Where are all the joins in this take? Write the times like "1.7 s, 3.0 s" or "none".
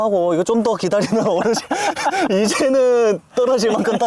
none